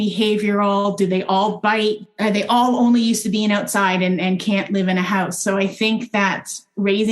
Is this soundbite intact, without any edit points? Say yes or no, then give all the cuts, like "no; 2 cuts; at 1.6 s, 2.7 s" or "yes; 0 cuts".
no; 1 cut; at 2.0 s